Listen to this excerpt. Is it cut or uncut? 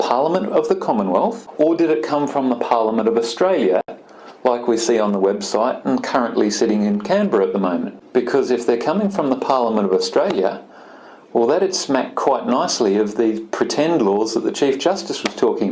cut